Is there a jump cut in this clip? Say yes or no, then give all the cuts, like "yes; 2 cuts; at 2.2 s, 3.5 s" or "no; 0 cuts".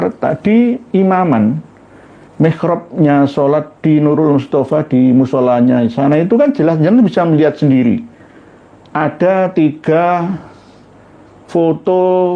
no; 0 cuts